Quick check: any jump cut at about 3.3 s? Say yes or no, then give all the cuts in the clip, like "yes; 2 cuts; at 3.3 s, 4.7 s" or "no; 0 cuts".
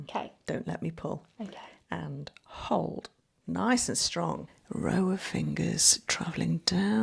no; 1 cut; at 4.5 s